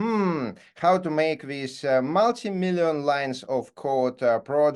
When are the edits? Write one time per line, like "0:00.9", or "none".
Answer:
none